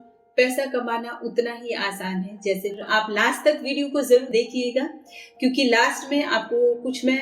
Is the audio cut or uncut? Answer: cut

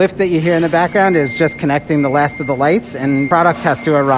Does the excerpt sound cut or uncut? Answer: cut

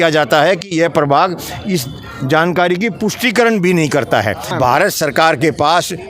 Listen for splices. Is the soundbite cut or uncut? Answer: cut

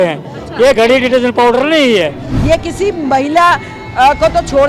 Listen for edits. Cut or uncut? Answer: cut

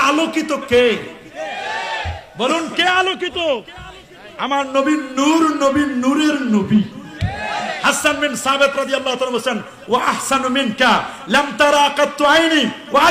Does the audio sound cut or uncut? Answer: uncut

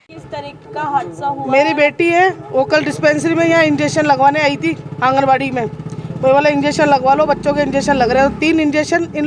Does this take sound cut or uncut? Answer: uncut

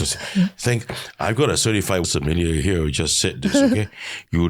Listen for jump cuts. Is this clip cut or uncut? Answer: cut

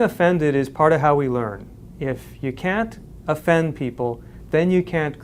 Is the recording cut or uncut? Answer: uncut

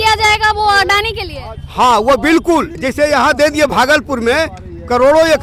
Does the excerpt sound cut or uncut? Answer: cut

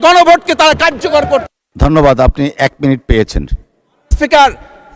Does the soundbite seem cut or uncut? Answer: uncut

